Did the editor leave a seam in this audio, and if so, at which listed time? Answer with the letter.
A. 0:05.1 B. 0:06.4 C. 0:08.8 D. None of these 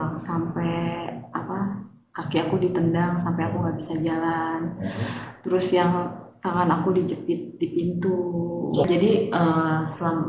C